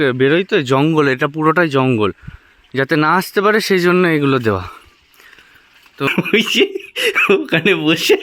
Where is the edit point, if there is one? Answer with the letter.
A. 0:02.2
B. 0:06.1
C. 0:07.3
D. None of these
B